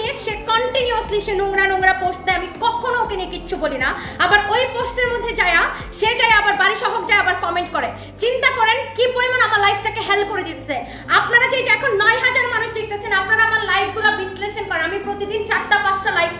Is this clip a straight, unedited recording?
yes; 0 cuts

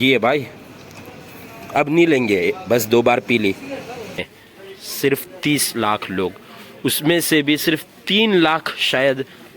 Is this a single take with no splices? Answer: no; 1 cut; at 4.2 s

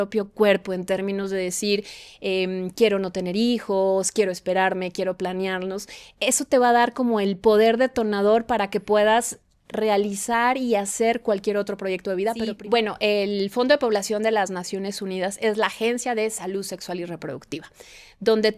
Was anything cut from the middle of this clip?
yes; 1 cut; at 12.5 s

